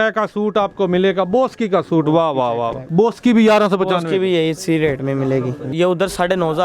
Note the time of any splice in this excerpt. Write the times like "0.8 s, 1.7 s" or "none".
2.8 s, 5.6 s